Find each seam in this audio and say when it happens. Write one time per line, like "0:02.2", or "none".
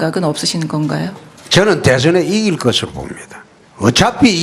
0:01.8